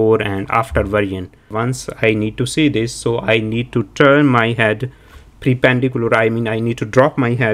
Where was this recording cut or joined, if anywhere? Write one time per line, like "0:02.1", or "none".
0:01.5